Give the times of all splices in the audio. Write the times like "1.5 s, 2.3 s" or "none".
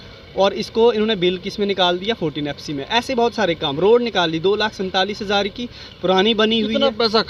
none